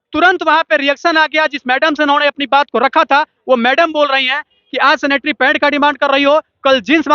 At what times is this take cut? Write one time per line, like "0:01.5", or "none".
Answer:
none